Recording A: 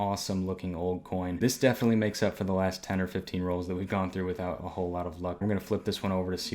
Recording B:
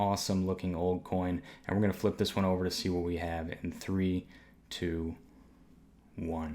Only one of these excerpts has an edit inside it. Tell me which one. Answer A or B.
A